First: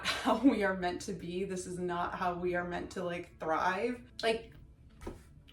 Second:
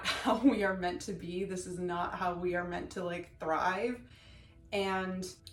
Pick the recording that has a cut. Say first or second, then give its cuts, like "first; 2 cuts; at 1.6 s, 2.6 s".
first; 1 cut; at 4.1 s